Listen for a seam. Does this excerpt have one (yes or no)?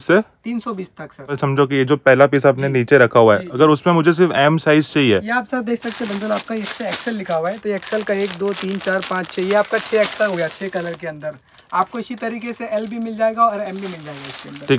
yes